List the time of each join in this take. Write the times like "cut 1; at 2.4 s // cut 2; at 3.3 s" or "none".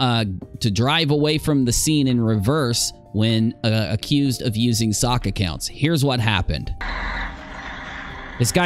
cut 1; at 6.8 s